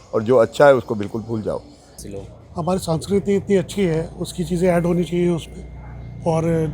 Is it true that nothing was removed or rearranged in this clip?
no; 1 cut; at 1.9 s

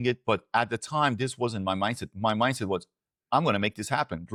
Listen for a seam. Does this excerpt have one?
no; 0 cuts

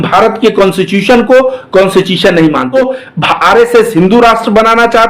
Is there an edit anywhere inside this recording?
yes; 1 cut; at 2.7 s

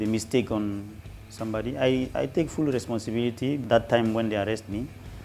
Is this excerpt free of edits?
no; 1 cut; at 3.6 s

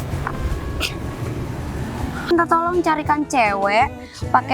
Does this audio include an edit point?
yes; 1 cut; at 2.3 s

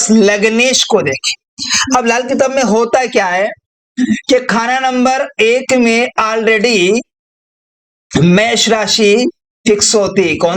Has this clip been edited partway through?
no; 0 cuts

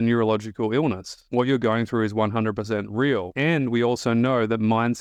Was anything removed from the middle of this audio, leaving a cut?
no; 0 cuts

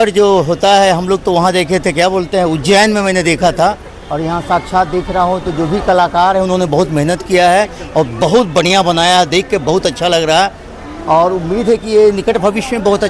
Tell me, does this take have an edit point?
no; 0 cuts

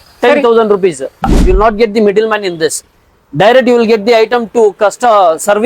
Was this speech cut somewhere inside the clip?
yes; 1 cut; at 1.2 s

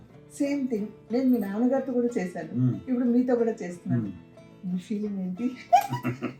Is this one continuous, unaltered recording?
yes; 0 cuts

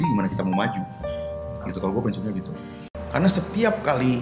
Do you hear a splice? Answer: yes; 1 cut; at 3.0 s

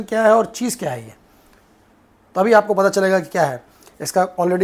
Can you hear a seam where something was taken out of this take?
no; 0 cuts

